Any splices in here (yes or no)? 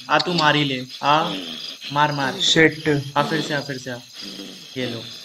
no